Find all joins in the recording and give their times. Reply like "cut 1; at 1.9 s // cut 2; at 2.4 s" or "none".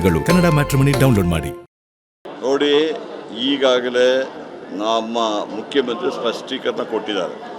cut 1; at 2.3 s